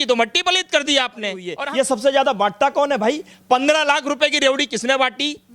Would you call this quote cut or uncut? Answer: cut